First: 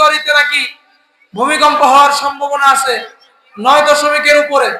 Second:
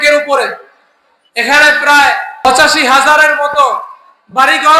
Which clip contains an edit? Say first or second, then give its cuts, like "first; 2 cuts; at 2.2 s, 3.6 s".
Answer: second; 1 cut; at 2.5 s